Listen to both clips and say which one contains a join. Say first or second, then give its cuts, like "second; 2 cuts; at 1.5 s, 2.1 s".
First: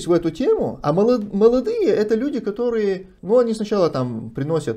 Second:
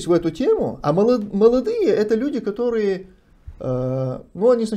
first; 1 cut; at 3.1 s